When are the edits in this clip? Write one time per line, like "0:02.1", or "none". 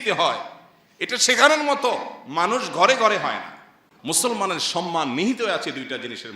0:03.9

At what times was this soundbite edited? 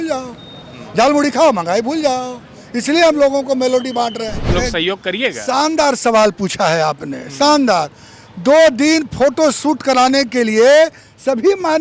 0:04.5

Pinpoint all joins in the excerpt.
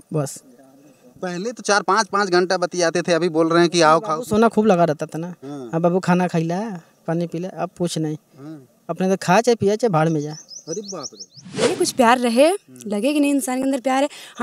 0:11.7

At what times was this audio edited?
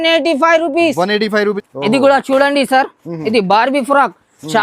0:01.6

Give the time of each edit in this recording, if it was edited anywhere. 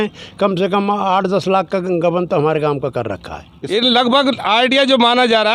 0:03.6

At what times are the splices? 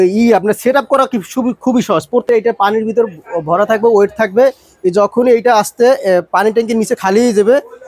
0:02.2

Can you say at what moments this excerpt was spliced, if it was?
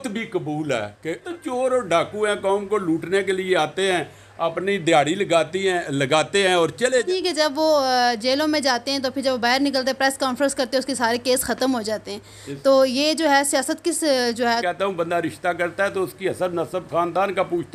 0:01.2
0:07.0
0:14.6

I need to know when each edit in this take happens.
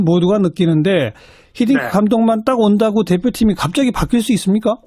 none

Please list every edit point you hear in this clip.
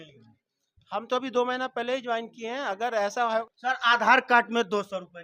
0:03.4

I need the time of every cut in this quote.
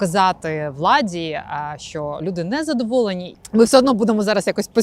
0:03.3

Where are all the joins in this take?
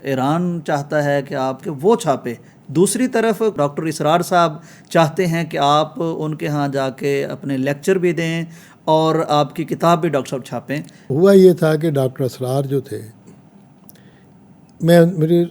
none

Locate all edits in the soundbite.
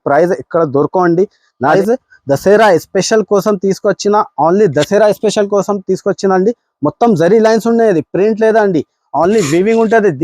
0:01.8

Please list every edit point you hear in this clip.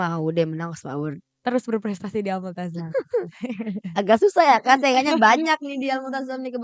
none

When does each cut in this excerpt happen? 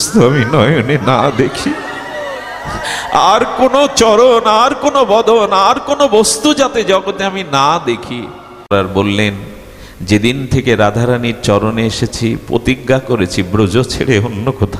0:08.6

